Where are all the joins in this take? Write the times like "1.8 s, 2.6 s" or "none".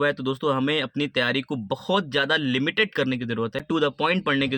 3.6 s